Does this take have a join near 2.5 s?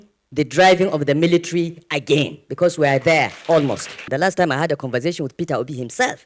no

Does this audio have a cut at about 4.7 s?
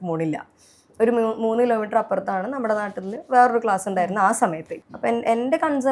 yes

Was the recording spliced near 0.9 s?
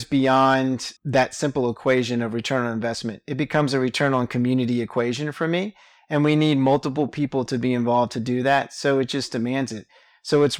yes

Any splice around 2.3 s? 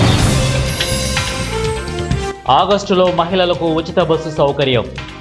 yes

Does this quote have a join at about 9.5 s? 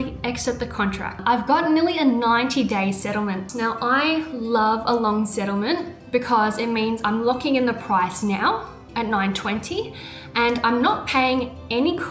no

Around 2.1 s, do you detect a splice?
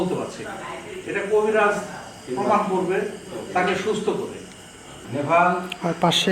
no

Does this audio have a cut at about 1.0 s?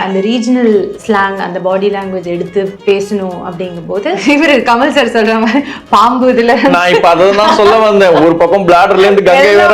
yes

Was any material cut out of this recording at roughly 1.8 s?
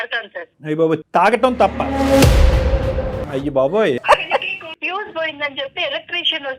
no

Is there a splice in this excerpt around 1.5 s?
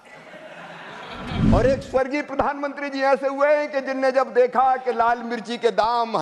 yes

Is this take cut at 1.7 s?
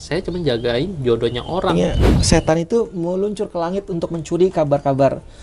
yes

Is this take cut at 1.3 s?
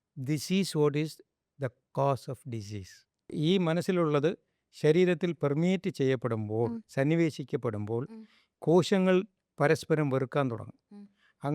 no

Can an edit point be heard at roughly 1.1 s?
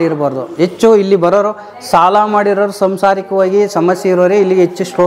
no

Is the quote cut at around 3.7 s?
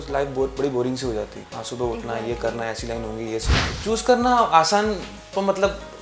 yes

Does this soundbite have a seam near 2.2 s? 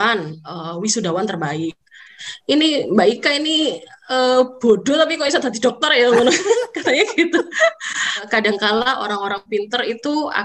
yes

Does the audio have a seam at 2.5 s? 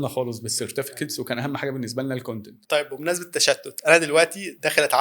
yes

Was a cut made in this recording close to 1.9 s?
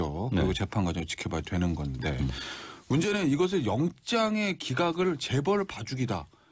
no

